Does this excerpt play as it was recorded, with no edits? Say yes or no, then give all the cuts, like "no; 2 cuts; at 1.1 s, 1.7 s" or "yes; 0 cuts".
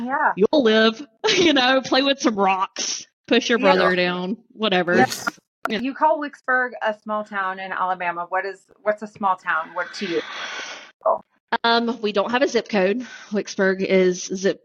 no; 1 cut; at 5.7 s